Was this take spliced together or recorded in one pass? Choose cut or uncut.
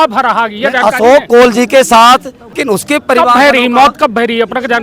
cut